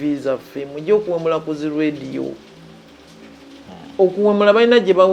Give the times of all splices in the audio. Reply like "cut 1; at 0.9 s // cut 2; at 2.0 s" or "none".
none